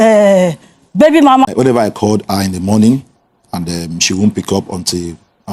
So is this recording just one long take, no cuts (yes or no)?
no